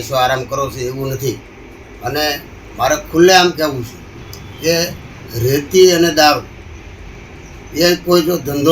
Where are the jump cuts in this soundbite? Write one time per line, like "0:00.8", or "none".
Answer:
none